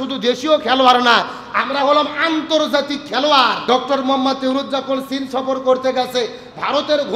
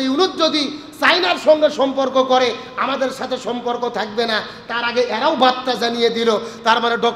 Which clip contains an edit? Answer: first; 1 cut; at 3.6 s

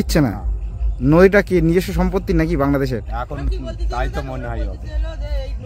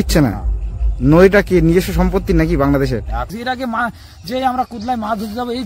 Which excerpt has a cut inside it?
second; 1 cut; at 3.3 s

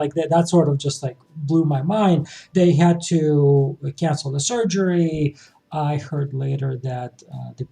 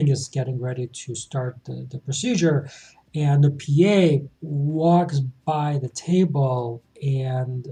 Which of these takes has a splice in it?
first; 1 cut; at 2.4 s

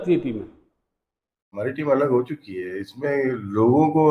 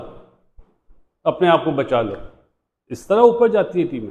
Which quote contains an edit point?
first; 1 cut; at 1.5 s

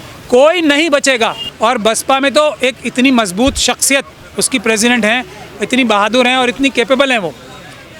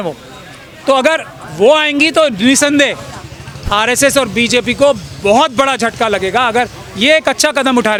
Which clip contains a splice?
first; 1 cut; at 1.4 s

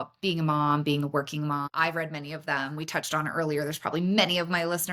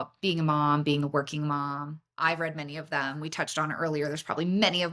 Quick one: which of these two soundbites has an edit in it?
first; 1 cut; at 1.7 s

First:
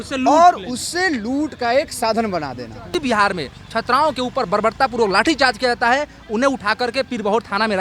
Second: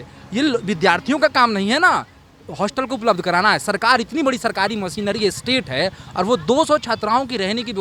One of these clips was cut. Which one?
first; 1 cut; at 2.9 s

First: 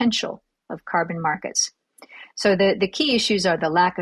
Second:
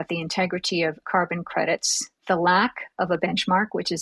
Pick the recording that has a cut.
second; 2 cuts; at 1.0 s, 2.9 s

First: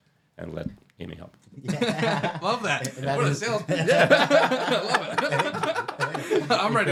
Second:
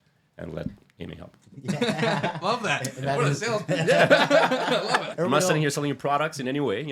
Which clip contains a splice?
second; 1 cut; at 5.1 s

